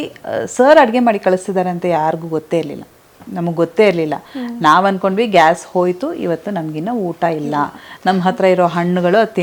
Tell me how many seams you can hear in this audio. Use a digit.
0